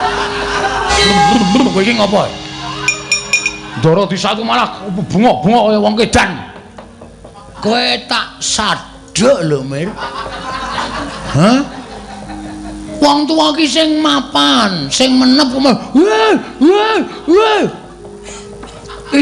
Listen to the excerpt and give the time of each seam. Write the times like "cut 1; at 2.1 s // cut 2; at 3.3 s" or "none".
cut 1; at 0.9 s